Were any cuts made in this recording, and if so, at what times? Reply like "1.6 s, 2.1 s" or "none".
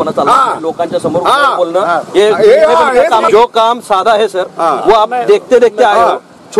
3.3 s